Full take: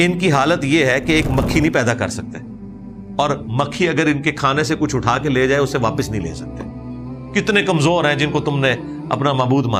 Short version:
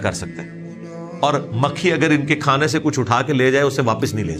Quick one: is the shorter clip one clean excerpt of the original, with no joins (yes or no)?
yes